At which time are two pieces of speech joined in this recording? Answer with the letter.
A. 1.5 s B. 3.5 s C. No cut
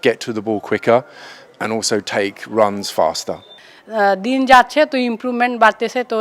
B